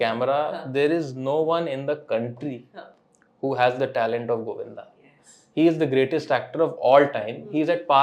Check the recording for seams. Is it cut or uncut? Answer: uncut